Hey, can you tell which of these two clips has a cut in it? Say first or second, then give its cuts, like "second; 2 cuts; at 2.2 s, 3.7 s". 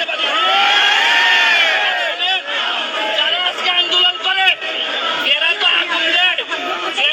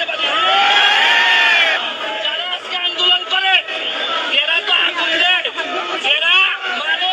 second; 1 cut; at 1.8 s